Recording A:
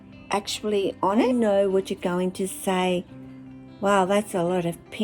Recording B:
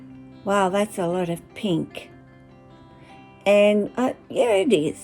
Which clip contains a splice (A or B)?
A